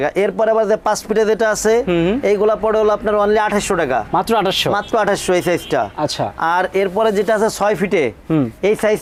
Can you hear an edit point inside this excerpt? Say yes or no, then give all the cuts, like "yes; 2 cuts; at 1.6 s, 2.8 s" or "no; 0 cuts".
no; 0 cuts